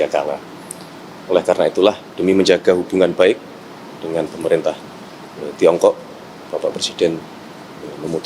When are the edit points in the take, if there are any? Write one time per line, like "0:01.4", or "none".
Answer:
0:02.1